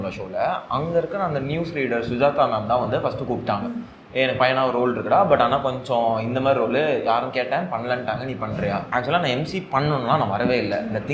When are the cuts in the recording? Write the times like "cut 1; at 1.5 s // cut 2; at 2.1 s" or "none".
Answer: cut 1; at 8.9 s